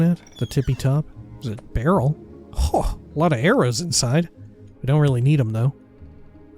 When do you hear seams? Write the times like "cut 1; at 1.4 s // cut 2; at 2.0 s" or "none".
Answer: cut 1; at 1.2 s